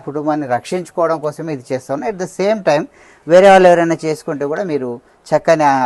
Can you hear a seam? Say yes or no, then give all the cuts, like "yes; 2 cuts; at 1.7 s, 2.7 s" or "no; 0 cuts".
no; 0 cuts